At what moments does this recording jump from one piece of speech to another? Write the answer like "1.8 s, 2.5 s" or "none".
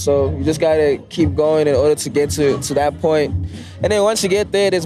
none